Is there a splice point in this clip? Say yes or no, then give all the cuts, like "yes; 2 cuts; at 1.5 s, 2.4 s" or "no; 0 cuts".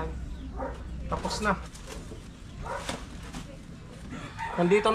no; 0 cuts